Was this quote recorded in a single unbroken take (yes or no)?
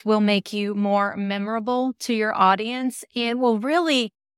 yes